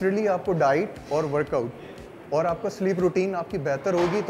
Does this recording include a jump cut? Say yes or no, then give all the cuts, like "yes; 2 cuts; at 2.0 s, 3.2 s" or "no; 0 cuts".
no; 0 cuts